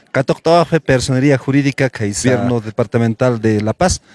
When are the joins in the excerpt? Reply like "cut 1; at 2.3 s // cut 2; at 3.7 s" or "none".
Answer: cut 1; at 2.2 s